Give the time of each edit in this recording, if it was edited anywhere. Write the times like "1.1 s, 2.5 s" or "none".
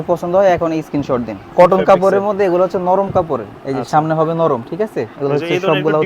1.4 s, 5.1 s